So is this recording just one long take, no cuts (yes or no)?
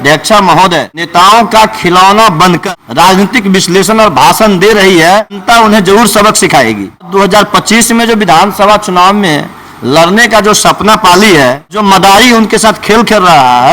no